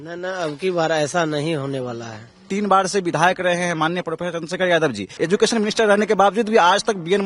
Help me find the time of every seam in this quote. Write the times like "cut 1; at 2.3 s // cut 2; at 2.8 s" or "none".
cut 1; at 2.5 s // cut 2; at 5.1 s